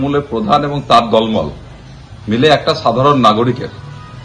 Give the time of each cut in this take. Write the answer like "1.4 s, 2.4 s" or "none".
none